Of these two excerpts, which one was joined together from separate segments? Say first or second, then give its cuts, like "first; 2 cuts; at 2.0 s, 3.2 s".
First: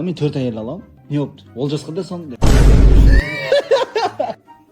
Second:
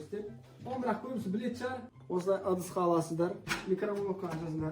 first; 2 cuts; at 0.9 s, 2.3 s